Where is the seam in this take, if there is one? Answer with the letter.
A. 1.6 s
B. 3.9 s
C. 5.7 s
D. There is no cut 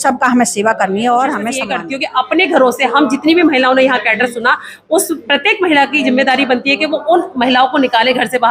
A